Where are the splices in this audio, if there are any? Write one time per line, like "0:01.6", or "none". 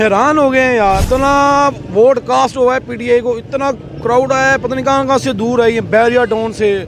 0:01.0